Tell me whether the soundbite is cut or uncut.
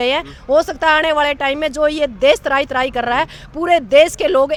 uncut